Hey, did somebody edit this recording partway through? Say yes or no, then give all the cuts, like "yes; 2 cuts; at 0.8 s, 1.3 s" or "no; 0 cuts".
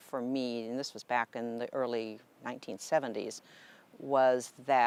no; 0 cuts